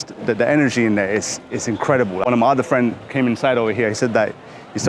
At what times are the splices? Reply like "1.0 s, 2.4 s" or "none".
2.2 s